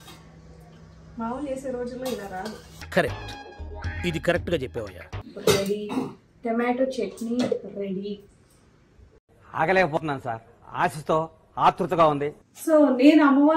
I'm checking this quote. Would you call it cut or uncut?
cut